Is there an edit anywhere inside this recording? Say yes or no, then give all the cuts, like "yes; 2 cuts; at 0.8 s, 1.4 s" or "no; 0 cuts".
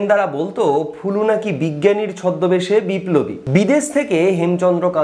yes; 1 cut; at 3.4 s